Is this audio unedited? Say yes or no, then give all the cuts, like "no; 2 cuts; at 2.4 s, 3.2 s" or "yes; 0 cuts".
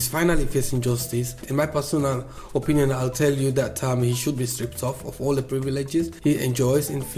no; 2 cuts; at 1.4 s, 6.1 s